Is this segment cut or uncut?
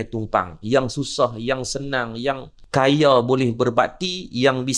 cut